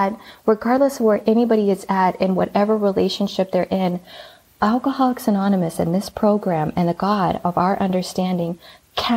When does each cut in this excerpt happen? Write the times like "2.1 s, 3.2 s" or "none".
none